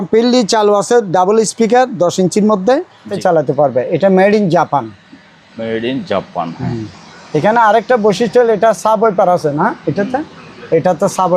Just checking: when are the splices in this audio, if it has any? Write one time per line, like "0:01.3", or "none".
0:03.1